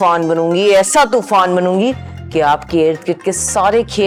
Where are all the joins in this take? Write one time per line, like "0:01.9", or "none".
none